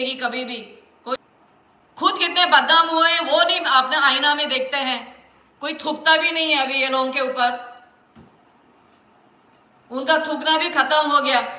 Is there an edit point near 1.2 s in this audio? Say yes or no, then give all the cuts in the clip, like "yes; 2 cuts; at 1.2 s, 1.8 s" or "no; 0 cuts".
yes; 1 cut; at 1.2 s